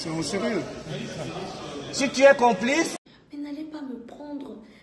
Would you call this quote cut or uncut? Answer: cut